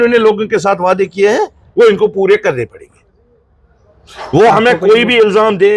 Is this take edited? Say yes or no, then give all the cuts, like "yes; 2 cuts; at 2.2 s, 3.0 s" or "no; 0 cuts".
no; 0 cuts